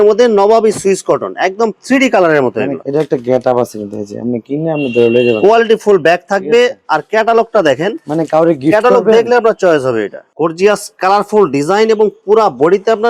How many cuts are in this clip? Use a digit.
2